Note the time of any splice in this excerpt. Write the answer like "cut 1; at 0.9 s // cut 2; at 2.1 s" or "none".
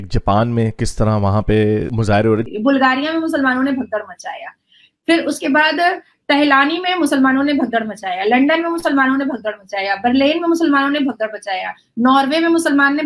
cut 1; at 2.4 s